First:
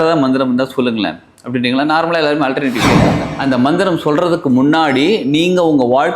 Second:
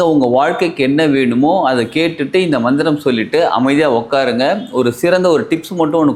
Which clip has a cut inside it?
first; 1 cut; at 3.2 s

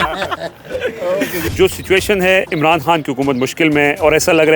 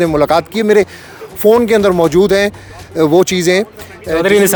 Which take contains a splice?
first; 1 cut; at 1.4 s

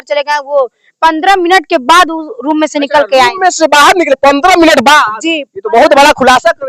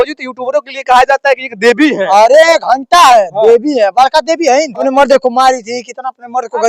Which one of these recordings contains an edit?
second; 1 cut; at 4.8 s

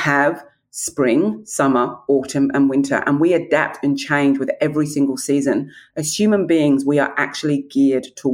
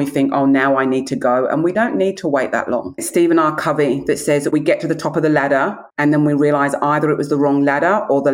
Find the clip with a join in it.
second; 3 cuts; at 1.7 s, 3.0 s, 5.8 s

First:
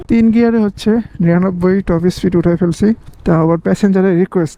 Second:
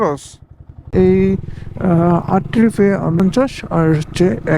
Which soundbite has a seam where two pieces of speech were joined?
second; 1 cut; at 0.9 s

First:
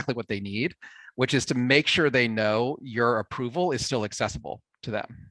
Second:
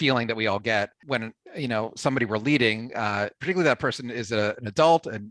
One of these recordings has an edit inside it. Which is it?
second; 1 cut; at 1.0 s

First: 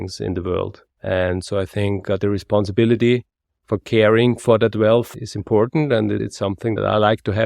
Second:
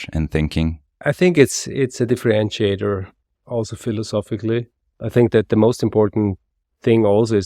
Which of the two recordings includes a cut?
first; 2 cuts; at 5.1 s, 6.5 s

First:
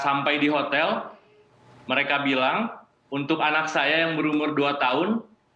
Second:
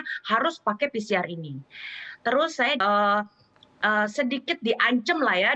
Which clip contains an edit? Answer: second; 1 cut; at 2.8 s

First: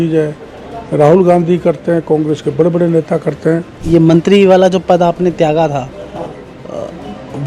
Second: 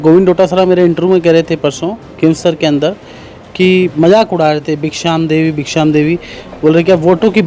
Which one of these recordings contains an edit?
first; 1 cut; at 3.7 s

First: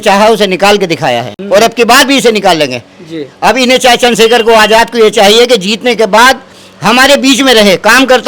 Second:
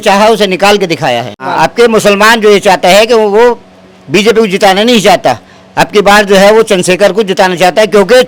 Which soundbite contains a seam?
second; 1 cut; at 1.4 s

